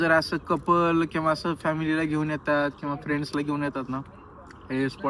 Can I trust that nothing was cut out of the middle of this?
yes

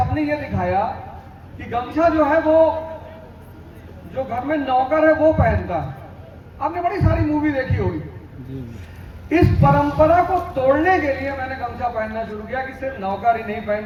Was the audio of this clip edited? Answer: no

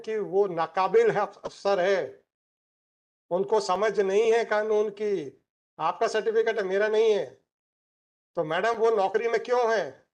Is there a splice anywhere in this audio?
no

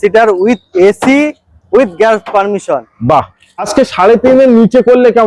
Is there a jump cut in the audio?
yes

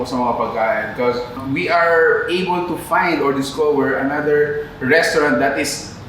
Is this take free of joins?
no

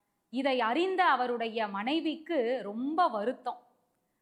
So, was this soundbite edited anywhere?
no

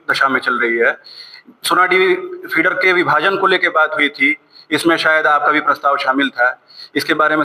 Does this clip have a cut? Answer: no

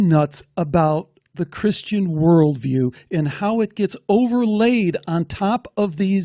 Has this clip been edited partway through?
no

